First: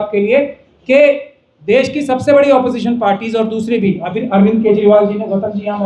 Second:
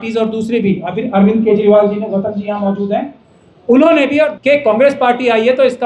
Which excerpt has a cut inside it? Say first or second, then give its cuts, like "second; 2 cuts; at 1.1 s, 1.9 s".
second; 1 cut; at 4.3 s